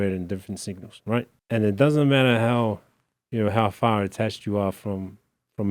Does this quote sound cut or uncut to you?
cut